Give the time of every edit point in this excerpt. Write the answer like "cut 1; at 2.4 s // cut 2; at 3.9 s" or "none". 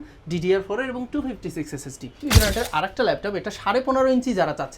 cut 1; at 2.2 s